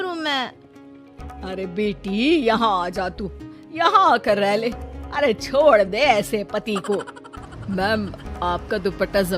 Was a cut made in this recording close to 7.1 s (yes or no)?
yes